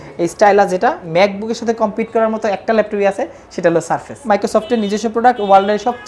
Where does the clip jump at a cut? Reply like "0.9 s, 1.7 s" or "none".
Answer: 1.0 s, 4.2 s